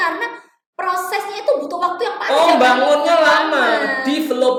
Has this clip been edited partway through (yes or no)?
no